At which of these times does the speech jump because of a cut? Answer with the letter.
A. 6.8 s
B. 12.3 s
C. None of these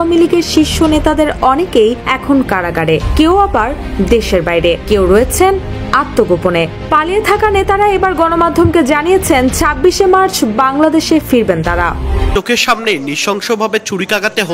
B